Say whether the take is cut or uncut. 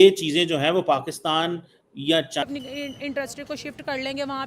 cut